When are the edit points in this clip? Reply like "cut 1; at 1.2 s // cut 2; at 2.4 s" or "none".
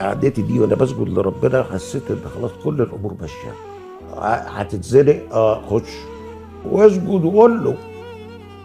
cut 1; at 6.6 s